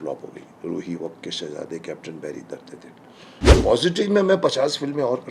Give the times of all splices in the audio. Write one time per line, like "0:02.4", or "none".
0:03.5